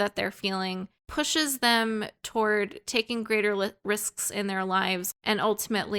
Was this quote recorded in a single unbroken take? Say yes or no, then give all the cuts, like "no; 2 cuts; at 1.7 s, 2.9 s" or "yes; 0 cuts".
no; 1 cut; at 5.0 s